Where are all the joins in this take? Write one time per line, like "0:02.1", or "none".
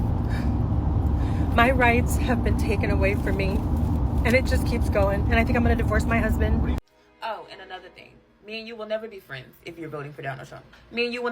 0:06.8